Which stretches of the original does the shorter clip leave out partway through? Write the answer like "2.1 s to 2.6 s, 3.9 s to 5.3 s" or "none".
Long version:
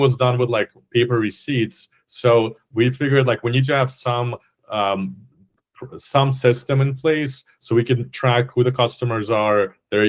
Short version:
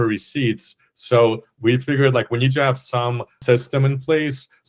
4.5 s to 6.3 s